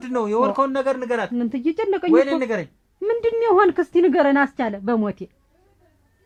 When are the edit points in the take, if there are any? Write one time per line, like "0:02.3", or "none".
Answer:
none